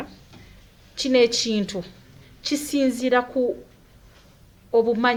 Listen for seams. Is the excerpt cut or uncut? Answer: uncut